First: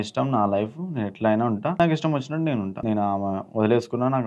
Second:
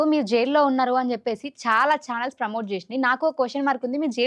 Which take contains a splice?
first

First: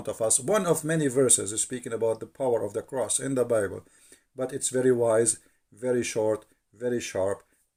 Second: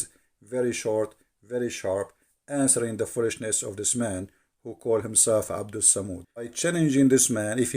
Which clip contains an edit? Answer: second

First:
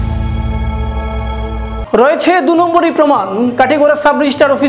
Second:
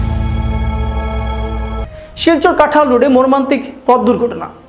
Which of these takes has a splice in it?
first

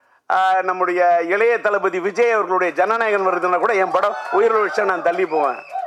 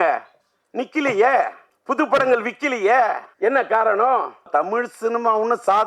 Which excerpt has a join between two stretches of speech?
second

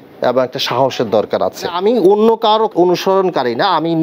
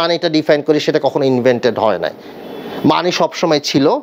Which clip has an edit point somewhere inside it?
first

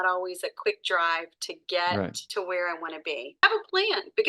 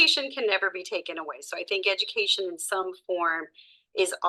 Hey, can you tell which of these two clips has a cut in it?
first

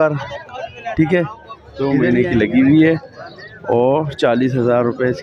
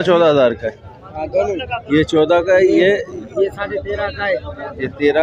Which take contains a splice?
first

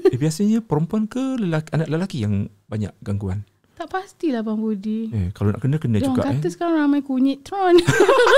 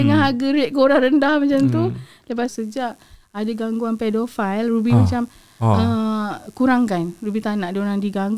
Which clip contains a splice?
second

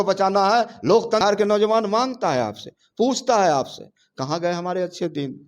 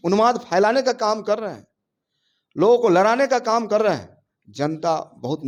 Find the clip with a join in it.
first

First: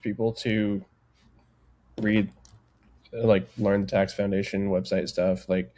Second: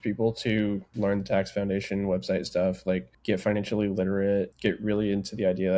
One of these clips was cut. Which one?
second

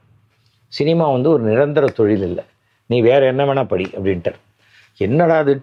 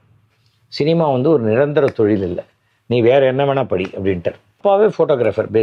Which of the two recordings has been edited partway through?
second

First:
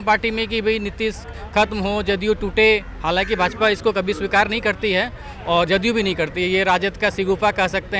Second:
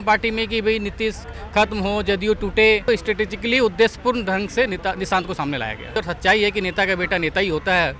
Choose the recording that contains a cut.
second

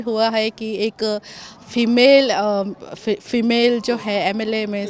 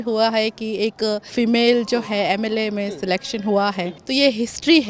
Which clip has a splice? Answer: second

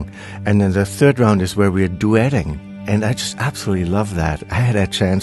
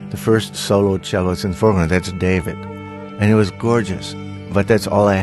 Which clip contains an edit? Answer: first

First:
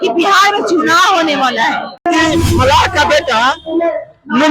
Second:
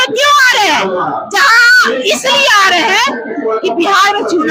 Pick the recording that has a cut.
first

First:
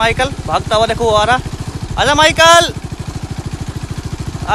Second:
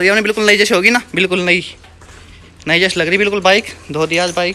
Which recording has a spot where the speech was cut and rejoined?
second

